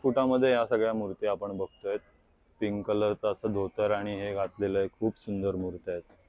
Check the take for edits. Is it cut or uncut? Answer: uncut